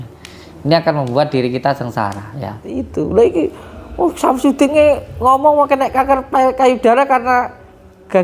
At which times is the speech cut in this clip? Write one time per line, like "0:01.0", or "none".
0:02.7